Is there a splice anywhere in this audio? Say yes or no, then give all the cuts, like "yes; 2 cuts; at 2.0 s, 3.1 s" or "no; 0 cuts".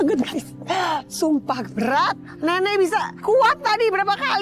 yes; 2 cuts; at 2.2 s, 3.1 s